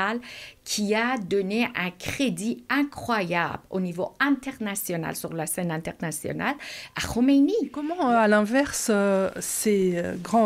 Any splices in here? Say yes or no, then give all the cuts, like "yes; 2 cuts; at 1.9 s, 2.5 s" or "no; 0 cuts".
yes; 1 cut; at 7.9 s